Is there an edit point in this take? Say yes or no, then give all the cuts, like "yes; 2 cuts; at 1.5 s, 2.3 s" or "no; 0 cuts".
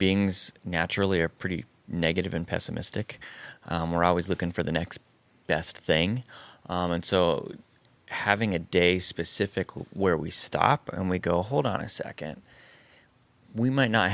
no; 0 cuts